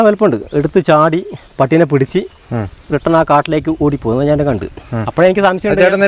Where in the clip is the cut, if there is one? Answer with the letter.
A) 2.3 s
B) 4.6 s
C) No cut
C